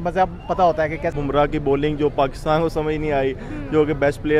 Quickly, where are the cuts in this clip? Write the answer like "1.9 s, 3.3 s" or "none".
1.1 s